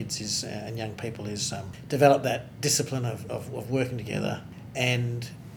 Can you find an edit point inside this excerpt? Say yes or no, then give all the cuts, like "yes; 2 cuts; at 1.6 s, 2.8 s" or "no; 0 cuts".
yes; 2 cuts; at 1.8 s, 4.6 s